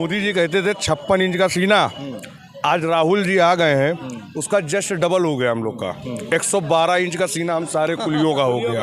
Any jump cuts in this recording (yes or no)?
no